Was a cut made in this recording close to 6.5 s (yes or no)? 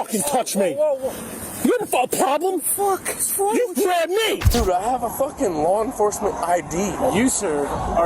no